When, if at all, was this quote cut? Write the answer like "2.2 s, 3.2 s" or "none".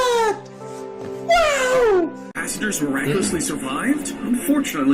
2.3 s